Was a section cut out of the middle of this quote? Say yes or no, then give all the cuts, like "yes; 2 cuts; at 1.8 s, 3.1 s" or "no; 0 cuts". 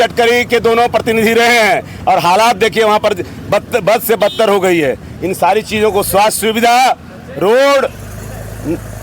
no; 0 cuts